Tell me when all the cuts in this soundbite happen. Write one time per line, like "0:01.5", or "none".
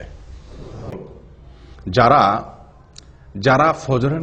0:00.9